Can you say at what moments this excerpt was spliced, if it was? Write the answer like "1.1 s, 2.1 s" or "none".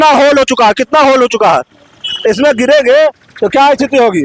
none